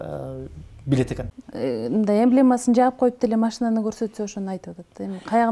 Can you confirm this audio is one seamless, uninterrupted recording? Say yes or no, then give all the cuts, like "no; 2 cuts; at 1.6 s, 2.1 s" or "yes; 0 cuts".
no; 1 cut; at 1.4 s